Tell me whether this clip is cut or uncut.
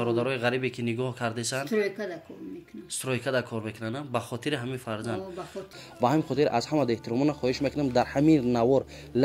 cut